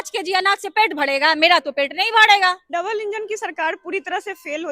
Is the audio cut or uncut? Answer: cut